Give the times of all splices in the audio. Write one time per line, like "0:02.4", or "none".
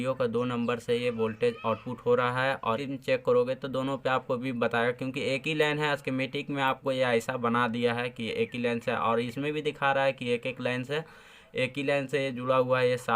0:02.8